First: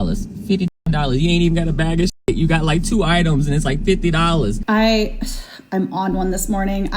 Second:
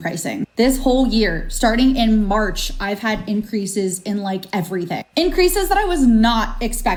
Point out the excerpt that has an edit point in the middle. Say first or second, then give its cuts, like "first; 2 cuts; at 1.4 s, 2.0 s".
first; 1 cut; at 4.6 s